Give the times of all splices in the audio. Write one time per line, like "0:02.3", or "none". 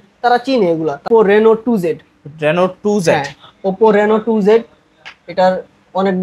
0:01.1